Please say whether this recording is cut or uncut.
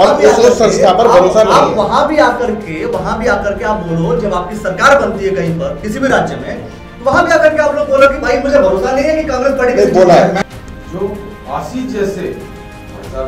cut